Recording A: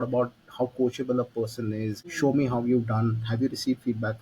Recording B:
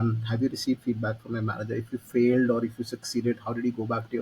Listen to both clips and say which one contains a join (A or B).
A